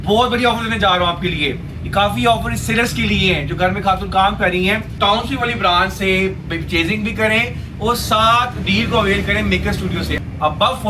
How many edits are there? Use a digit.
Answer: 2